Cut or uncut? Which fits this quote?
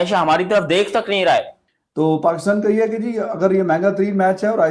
cut